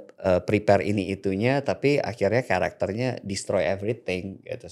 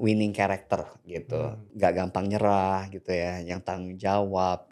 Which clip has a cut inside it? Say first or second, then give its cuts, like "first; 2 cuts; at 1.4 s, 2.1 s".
second; 1 cut; at 1.6 s